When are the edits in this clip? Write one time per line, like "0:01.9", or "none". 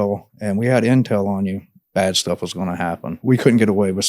0:03.2